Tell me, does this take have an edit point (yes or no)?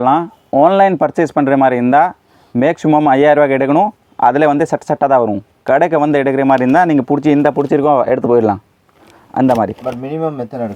no